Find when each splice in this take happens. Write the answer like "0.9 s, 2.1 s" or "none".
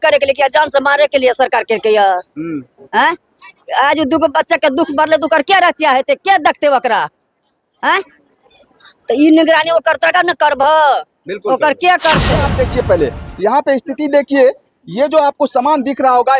12.5 s